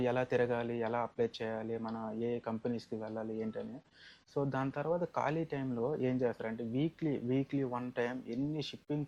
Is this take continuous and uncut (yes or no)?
yes